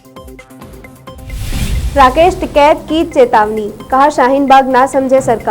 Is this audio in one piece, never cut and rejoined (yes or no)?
no